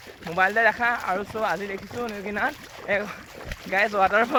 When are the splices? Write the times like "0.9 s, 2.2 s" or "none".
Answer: none